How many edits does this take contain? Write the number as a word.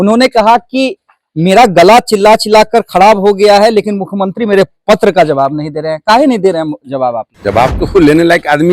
one